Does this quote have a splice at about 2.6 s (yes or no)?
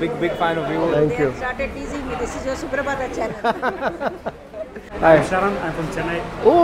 no